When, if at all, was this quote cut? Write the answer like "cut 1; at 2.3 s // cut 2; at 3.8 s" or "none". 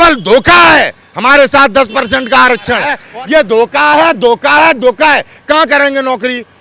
cut 1; at 3.0 s